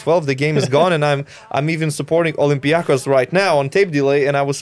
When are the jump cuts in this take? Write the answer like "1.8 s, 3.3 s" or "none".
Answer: none